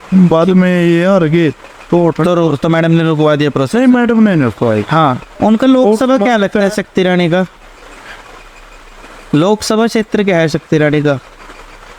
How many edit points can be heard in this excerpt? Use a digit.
1